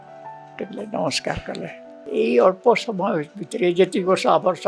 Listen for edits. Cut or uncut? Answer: cut